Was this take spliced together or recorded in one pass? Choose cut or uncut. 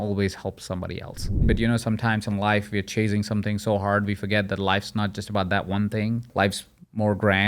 cut